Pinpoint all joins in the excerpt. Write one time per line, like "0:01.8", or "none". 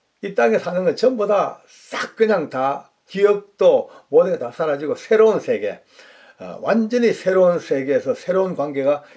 0:03.0